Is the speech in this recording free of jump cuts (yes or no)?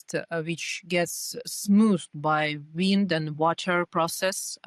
yes